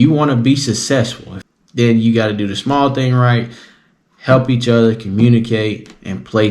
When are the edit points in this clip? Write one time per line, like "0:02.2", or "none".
0:01.3